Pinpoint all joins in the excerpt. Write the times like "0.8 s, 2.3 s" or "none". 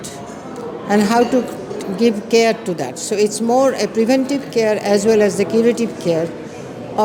none

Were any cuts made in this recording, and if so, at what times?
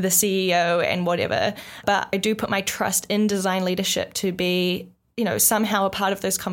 2.1 s

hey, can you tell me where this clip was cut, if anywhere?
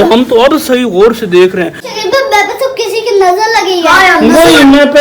1.9 s

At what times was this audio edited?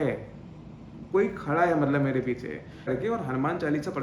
2.9 s

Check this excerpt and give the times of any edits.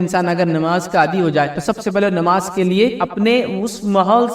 1.6 s, 3.0 s

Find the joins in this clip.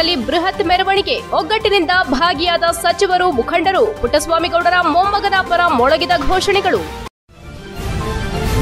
7.0 s

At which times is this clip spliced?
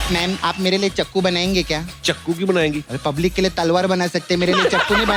none

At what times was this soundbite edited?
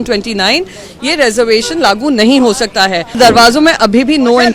3.2 s

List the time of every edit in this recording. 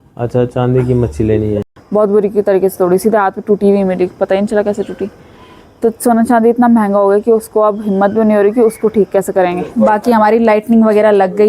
1.7 s, 9.6 s

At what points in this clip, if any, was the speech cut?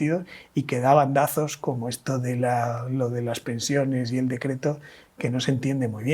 none

